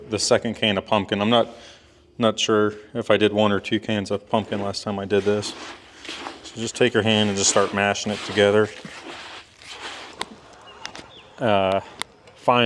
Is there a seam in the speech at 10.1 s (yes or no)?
yes